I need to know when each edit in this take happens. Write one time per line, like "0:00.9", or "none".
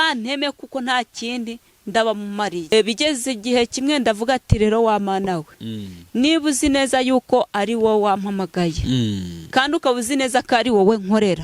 0:02.7